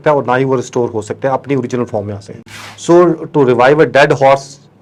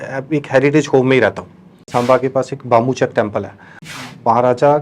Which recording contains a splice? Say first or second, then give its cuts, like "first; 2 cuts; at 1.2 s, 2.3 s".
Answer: second; 2 cuts; at 1.9 s, 3.9 s